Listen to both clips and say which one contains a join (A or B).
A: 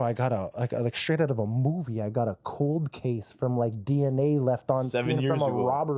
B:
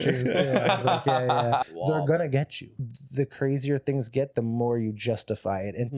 B